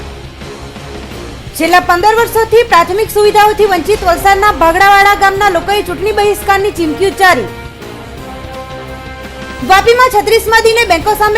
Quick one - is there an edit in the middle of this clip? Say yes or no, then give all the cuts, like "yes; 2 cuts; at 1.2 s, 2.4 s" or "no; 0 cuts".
yes; 1 cut; at 1.4 s